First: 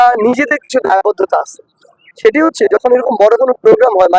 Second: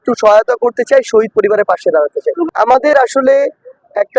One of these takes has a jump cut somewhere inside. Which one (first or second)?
second